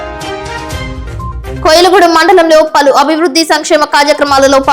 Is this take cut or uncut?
uncut